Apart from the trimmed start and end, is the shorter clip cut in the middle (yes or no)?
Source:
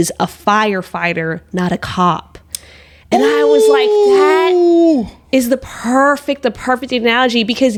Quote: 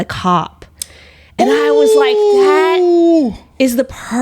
no